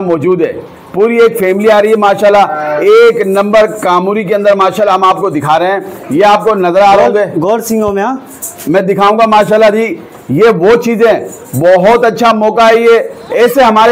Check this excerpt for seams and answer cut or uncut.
uncut